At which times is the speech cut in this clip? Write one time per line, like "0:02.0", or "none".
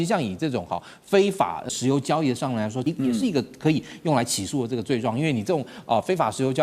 0:01.6
0:02.8